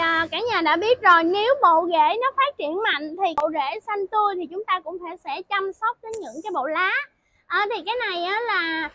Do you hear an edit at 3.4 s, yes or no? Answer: yes